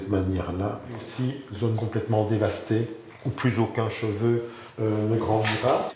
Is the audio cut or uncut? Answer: cut